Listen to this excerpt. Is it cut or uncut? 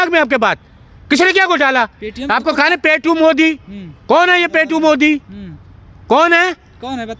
uncut